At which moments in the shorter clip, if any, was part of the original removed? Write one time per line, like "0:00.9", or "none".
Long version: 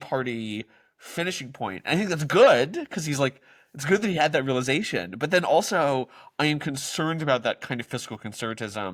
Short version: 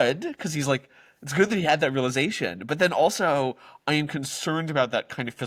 none